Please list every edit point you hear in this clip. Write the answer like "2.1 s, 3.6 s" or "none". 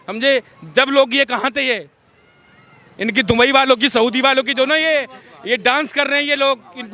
none